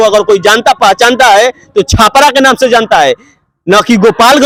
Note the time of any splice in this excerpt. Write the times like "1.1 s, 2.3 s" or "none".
none